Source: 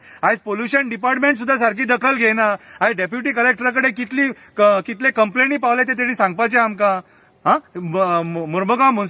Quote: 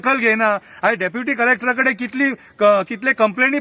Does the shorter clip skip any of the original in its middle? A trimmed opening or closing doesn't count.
no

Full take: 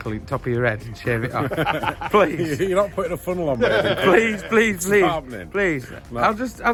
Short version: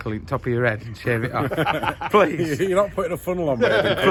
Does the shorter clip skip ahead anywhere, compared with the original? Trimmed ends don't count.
no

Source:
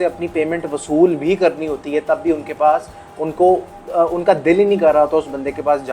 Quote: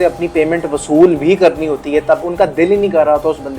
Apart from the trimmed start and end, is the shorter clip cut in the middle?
yes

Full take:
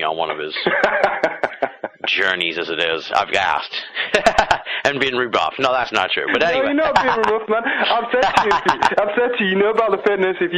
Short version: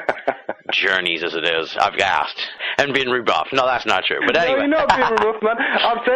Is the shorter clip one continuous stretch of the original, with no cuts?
no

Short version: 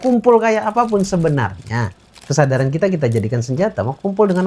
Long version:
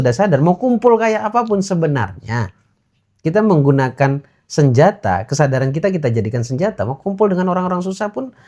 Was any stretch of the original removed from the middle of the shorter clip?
yes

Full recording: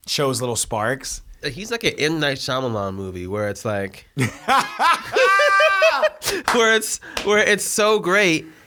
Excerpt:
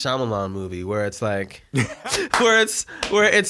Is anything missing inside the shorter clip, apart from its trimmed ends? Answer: yes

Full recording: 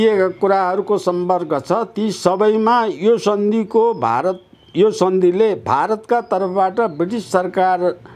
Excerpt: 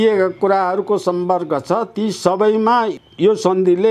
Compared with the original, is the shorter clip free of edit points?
no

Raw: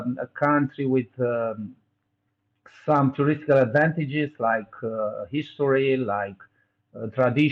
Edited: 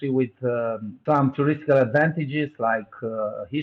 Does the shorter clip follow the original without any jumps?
no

